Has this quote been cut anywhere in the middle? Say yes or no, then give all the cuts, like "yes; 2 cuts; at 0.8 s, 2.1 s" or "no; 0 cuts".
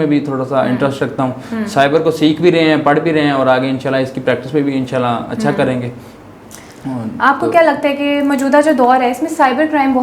no; 0 cuts